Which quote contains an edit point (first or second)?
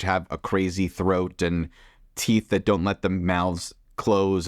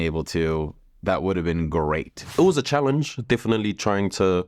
second